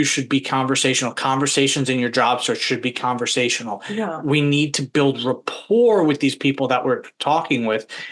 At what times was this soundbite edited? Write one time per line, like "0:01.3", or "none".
none